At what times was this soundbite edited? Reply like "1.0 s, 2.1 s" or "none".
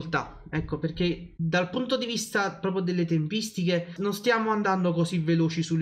1.3 s, 3.9 s